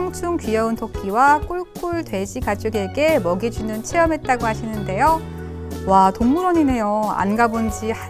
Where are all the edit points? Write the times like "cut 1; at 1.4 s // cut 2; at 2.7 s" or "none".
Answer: none